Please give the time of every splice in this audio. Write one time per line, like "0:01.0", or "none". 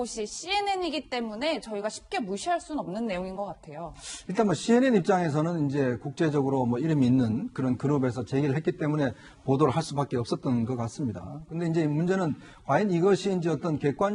none